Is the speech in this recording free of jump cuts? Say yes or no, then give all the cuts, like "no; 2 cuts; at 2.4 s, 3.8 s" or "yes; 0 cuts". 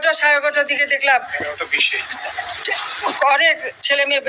yes; 0 cuts